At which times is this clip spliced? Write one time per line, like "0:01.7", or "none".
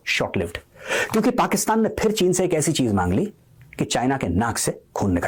none